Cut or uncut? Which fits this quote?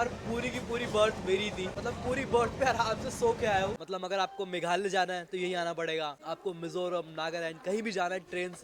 cut